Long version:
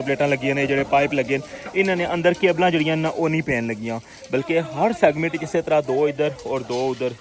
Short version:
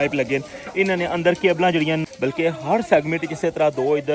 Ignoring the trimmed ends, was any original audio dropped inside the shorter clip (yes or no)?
yes